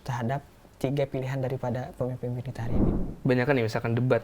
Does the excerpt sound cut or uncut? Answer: cut